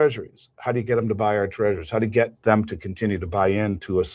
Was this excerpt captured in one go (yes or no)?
no